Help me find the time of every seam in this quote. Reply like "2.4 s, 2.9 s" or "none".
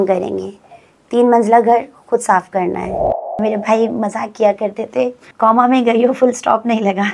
3.4 s, 5.2 s